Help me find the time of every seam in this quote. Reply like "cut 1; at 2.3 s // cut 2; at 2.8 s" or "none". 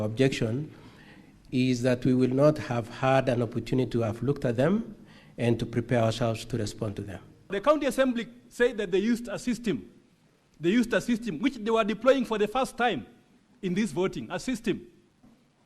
cut 1; at 7.5 s